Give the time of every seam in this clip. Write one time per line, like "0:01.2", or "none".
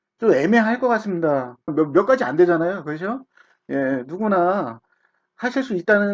0:01.7